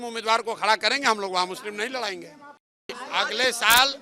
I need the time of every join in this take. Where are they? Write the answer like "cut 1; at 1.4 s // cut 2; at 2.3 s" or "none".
cut 1; at 3.0 s